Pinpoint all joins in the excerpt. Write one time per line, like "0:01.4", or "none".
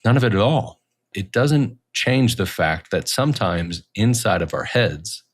0:01.2